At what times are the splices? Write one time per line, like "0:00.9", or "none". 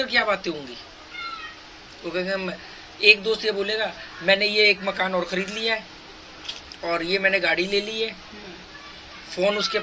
none

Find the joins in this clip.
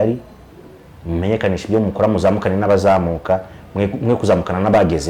none

